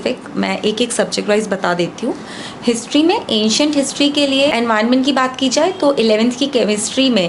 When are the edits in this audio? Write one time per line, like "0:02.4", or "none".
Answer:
0:04.5